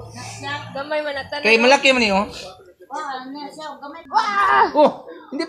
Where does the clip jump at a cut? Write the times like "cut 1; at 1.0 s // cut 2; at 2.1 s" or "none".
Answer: cut 1; at 4.0 s